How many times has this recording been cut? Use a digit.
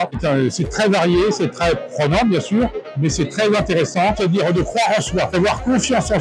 1